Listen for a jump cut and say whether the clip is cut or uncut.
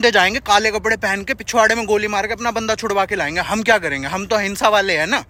uncut